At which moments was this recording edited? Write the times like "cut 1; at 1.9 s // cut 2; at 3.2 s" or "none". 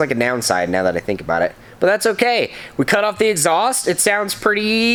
none